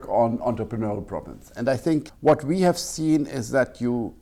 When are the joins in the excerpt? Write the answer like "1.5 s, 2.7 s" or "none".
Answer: none